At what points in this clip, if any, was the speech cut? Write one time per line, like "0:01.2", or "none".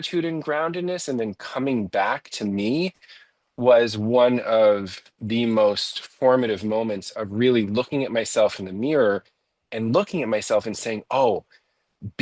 none